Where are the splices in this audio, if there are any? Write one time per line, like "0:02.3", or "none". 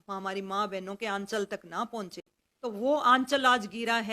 0:02.4